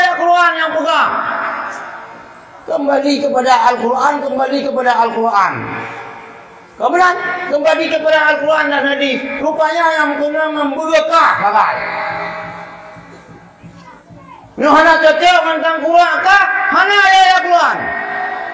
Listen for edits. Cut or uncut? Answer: uncut